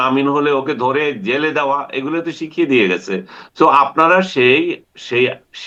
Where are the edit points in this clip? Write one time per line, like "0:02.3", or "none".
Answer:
none